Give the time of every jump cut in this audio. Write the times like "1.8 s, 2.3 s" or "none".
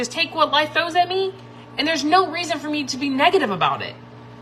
none